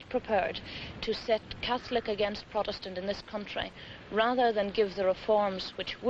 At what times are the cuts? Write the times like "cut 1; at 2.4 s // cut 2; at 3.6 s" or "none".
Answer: cut 1; at 3.9 s